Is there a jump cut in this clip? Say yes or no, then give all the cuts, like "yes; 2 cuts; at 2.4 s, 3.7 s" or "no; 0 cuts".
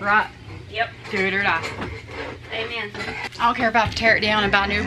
yes; 1 cut; at 3.3 s